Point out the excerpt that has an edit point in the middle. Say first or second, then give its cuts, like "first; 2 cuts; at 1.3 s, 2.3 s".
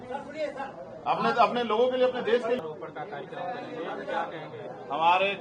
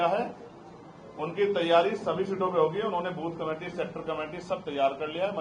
first; 1 cut; at 2.6 s